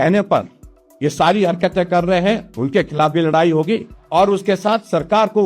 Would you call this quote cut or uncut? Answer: cut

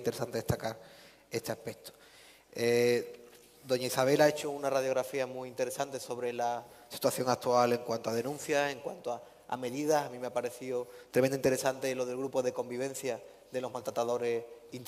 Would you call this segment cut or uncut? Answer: uncut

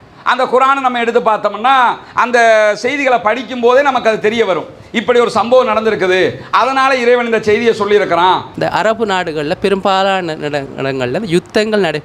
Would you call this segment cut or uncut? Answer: cut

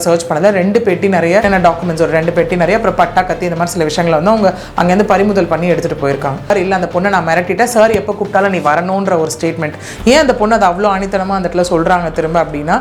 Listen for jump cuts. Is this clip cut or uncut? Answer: cut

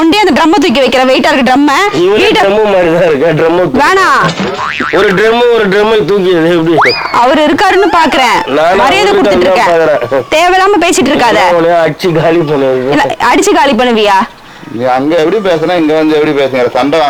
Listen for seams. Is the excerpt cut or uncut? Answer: uncut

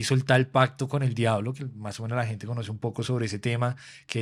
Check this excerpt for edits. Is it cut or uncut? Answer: uncut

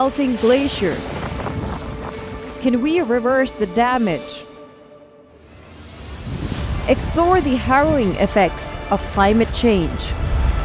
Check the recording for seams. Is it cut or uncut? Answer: uncut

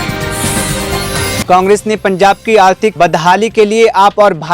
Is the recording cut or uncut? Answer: uncut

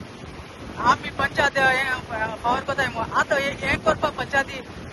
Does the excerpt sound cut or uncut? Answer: uncut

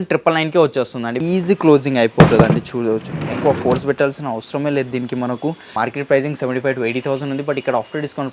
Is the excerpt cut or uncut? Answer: cut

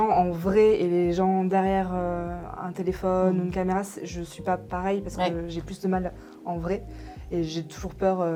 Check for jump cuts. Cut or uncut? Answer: uncut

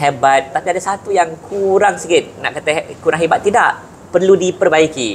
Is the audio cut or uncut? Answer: uncut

